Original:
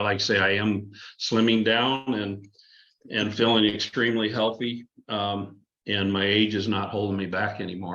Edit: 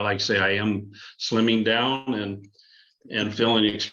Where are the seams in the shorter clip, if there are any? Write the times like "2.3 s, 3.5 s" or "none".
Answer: none